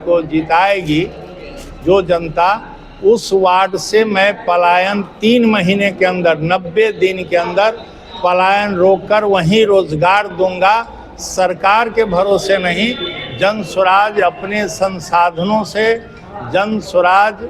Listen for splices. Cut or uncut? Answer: uncut